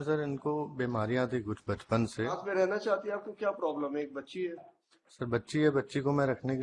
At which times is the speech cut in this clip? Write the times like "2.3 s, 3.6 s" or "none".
2.4 s